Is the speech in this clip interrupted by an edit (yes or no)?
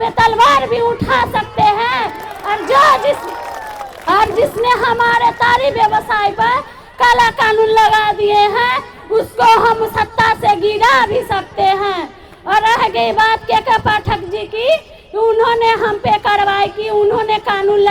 no